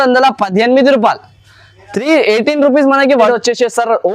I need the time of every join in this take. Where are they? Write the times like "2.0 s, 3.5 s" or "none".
3.2 s